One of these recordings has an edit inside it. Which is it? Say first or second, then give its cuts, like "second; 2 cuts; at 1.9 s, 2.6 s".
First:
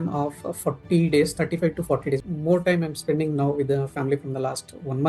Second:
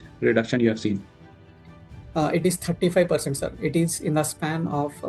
first; 1 cut; at 2.2 s